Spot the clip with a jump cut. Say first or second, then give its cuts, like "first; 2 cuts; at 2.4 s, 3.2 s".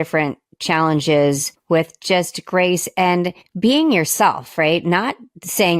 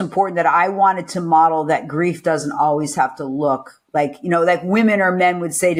first; 2 cuts; at 1.5 s, 3.4 s